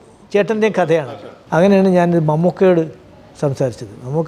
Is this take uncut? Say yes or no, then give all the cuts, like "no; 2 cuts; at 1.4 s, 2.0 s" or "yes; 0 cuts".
no; 1 cut; at 1.0 s